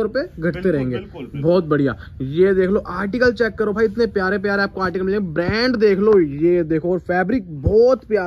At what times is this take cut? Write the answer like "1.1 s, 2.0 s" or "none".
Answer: none